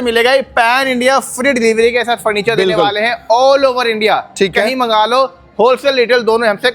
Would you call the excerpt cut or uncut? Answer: uncut